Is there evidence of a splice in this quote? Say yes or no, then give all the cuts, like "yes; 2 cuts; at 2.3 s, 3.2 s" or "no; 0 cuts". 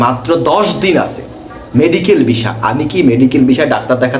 no; 0 cuts